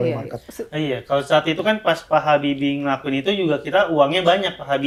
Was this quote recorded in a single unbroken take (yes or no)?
yes